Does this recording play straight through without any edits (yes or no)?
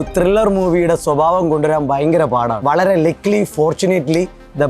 no